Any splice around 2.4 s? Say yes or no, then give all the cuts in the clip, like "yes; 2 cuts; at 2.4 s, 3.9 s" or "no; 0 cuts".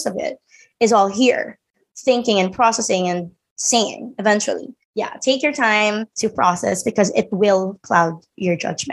no; 2 cuts; at 4.8 s, 6.1 s